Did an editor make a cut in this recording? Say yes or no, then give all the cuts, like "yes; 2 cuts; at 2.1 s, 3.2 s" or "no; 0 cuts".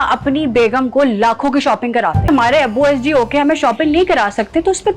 yes; 1 cut; at 2.3 s